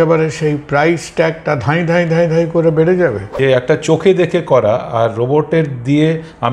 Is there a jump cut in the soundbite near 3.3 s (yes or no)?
yes